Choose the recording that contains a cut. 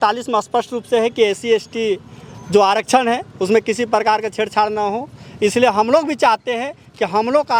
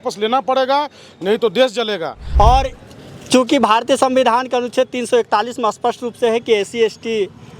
second; 1 cut; at 2.2 s

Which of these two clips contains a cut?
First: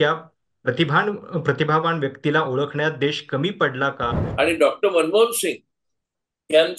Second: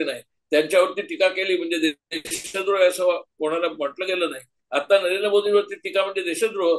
first; 1 cut; at 4.2 s

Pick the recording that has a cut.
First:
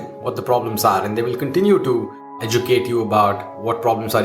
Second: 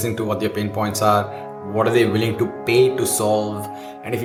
first; 1 cut; at 2.4 s

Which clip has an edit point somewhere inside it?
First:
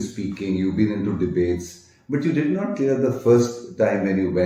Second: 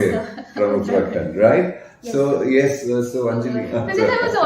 second; 1 cut; at 3.6 s

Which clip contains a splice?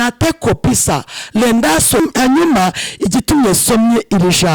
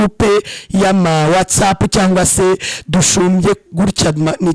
first; 1 cut; at 2.0 s

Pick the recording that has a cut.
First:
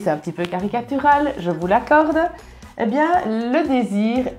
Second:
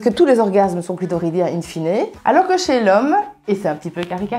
second; 1 cut; at 2.2 s

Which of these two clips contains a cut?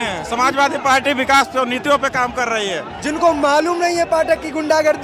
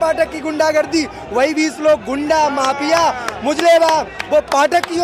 first; 1 cut; at 2.9 s

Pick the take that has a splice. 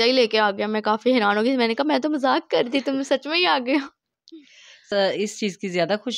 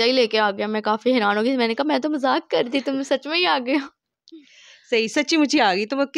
first; 1 cut; at 4.9 s

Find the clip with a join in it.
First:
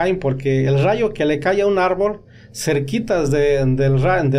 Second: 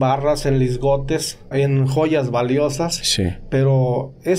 second; 1 cut; at 1.5 s

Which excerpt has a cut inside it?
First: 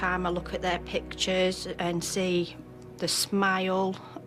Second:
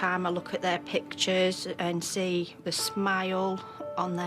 second; 1 cut; at 2.5 s

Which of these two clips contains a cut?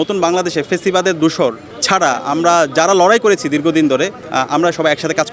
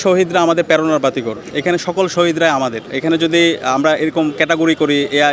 second; 2 cuts; at 1.9 s, 2.9 s

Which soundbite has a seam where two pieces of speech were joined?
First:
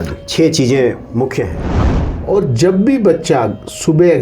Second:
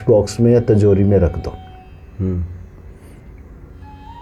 first; 1 cut; at 1.7 s

